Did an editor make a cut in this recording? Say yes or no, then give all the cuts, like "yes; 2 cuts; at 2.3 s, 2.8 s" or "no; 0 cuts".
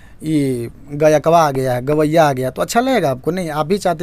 no; 0 cuts